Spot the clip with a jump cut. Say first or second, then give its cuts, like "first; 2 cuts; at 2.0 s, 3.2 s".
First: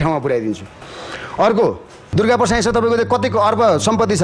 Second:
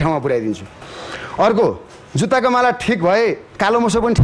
first; 1 cut; at 1.9 s